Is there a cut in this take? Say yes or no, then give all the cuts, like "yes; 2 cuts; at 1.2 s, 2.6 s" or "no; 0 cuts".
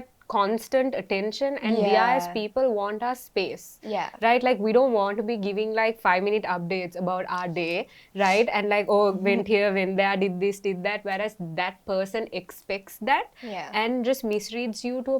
no; 0 cuts